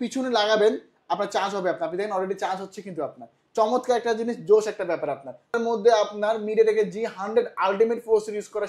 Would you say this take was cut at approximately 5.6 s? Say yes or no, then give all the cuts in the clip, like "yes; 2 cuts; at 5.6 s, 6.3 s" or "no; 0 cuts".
yes; 1 cut; at 5.6 s